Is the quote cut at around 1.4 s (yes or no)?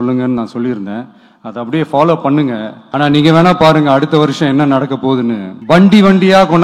no